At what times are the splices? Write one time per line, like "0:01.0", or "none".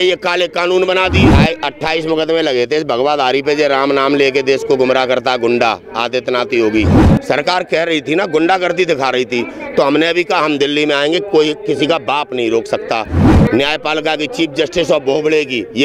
0:01.2
0:07.0
0:13.2